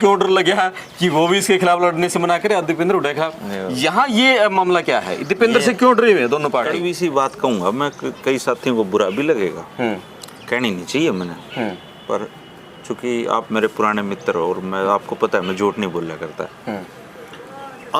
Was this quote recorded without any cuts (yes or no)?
no